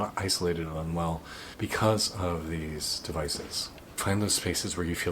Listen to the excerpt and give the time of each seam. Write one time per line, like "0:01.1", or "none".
0:04.0

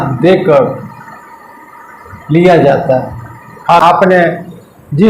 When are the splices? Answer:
0:03.7

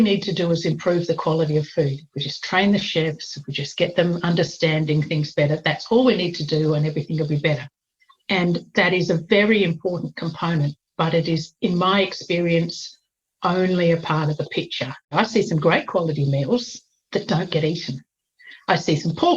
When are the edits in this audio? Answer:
0:15.0

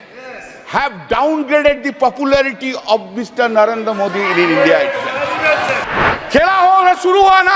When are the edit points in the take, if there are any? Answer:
0:05.8

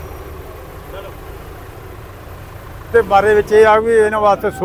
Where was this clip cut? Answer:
0:02.9

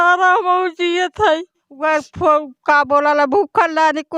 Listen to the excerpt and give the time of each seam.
0:01.8

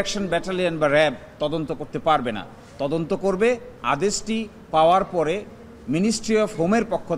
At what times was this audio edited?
none

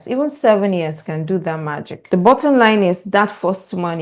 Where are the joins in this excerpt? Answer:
0:02.0

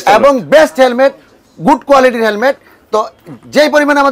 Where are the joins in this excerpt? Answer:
none

